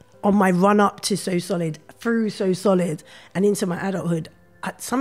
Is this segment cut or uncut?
uncut